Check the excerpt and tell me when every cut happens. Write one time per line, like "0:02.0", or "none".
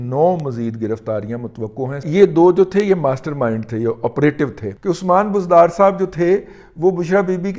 0:02.0
0:04.7